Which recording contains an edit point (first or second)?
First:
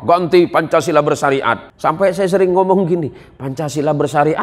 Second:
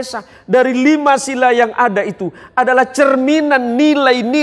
first